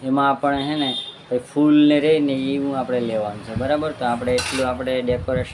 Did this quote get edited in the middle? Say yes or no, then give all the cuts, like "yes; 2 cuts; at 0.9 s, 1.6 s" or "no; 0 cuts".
no; 0 cuts